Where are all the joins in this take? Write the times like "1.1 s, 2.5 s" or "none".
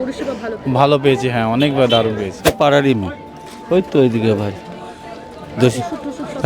2.4 s